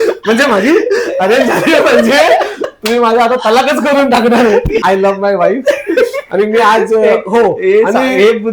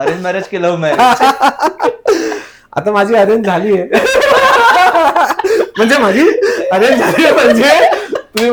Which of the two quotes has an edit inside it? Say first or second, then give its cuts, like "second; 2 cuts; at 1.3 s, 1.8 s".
first; 1 cut; at 4.8 s